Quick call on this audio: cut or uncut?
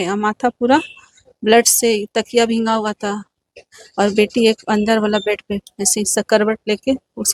uncut